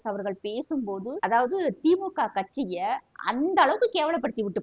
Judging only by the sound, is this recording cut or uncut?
cut